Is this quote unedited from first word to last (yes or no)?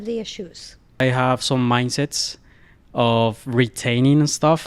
no